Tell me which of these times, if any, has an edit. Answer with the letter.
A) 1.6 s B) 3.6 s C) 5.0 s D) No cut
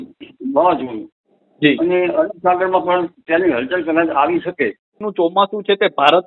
C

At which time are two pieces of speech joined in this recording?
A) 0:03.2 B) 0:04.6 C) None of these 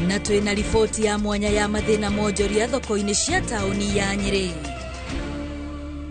B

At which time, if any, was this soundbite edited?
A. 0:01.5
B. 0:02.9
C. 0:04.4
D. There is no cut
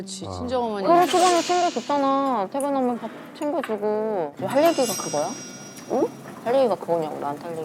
C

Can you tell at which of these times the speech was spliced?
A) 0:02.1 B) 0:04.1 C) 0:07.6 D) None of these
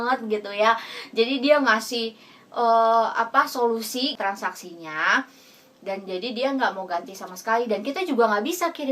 B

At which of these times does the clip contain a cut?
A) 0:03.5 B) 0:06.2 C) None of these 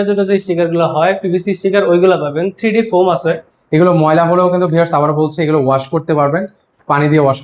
A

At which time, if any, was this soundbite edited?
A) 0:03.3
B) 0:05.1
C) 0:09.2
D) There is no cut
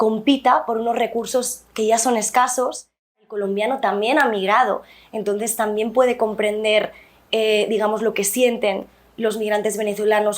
A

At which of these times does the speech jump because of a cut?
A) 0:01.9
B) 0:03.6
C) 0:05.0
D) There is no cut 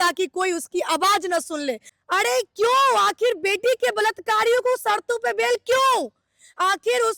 A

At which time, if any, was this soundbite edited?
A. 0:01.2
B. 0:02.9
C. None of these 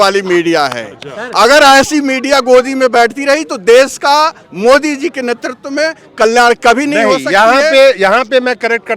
C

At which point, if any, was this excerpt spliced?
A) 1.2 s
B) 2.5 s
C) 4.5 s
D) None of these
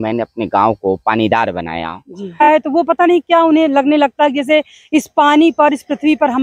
B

